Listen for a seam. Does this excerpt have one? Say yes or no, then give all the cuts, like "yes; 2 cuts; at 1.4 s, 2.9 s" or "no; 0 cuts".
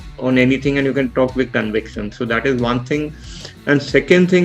no; 0 cuts